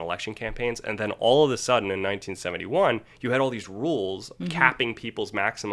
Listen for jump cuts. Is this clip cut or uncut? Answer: uncut